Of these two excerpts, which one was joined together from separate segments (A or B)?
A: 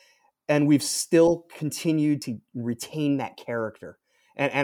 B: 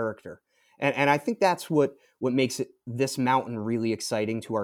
A